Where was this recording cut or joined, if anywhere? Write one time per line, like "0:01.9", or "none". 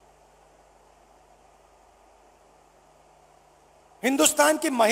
none